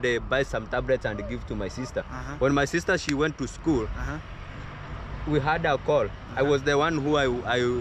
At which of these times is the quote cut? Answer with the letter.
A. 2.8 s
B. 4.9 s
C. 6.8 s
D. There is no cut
D